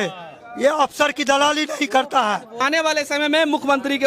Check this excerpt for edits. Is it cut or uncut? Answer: cut